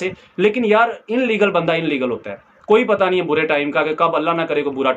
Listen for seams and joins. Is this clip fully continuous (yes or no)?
yes